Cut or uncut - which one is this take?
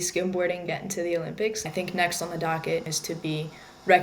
cut